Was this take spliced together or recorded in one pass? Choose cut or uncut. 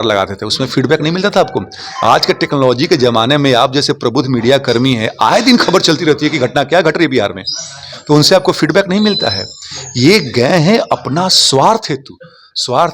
uncut